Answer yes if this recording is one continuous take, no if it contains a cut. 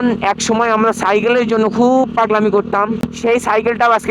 no